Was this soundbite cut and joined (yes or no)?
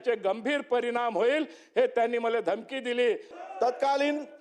yes